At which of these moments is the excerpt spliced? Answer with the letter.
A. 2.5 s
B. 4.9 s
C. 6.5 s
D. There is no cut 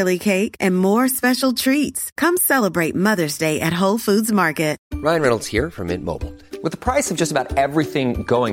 B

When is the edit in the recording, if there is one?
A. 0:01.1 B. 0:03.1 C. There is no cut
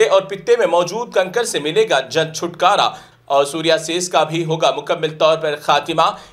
B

